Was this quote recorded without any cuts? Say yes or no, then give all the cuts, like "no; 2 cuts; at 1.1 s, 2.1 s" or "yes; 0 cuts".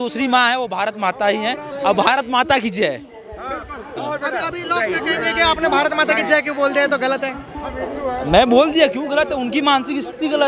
yes; 0 cuts